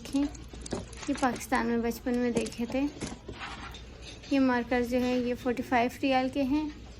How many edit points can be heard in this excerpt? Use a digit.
1